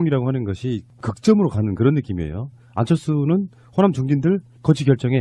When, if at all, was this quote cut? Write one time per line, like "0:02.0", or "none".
0:04.2